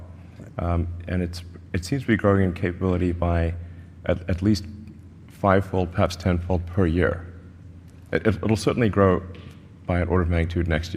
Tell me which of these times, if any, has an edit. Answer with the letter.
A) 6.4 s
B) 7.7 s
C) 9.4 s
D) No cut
D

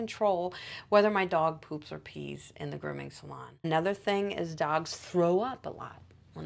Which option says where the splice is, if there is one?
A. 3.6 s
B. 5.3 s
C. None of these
A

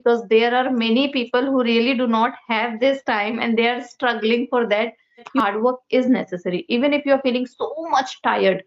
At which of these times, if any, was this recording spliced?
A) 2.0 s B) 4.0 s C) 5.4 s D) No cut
C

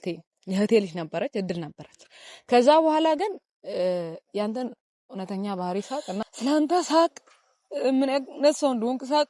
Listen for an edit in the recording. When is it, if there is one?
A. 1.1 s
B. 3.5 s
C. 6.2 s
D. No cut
C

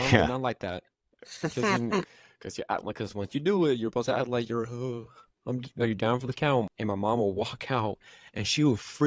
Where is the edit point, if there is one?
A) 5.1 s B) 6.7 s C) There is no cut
B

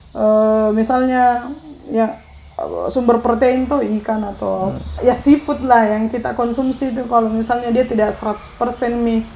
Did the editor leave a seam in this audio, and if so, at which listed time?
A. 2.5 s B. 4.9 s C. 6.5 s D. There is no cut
B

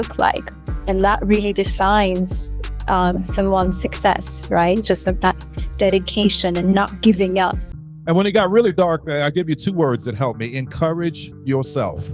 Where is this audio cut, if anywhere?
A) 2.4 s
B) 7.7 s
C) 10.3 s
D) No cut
B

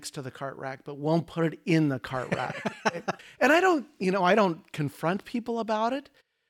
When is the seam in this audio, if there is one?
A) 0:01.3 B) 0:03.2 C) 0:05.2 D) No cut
B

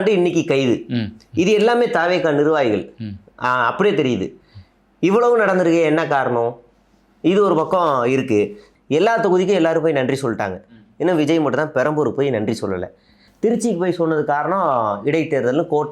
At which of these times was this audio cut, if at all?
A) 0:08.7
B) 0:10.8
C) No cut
A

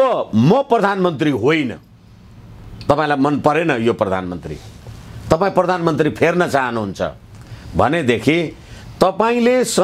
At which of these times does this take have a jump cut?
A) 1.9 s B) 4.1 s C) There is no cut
C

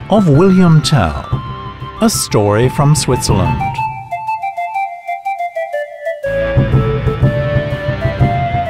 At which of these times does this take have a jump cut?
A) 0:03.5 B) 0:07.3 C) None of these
A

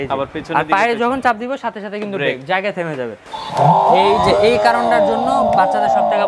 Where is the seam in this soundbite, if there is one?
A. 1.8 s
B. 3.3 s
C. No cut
B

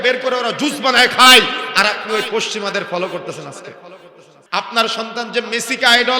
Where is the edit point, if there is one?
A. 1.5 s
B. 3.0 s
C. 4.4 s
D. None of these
C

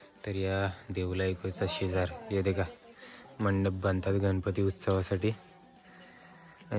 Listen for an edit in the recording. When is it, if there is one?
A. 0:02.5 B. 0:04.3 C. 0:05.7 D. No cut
D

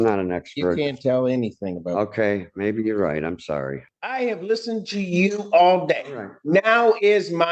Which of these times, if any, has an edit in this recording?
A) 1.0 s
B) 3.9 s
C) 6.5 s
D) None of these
B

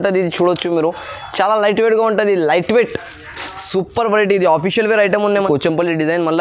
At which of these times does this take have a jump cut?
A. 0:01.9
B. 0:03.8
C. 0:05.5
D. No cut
C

